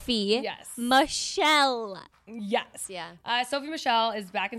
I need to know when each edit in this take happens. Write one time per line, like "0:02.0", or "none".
0:02.8